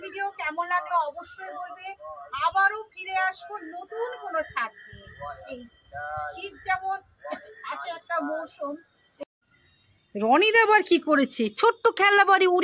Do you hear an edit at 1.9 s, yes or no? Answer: no